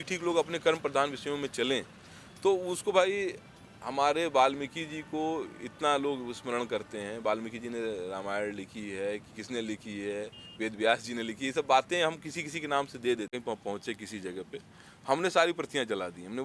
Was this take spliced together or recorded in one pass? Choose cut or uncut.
cut